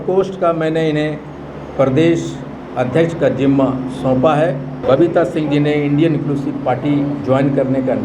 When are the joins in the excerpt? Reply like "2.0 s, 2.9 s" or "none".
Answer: 4.7 s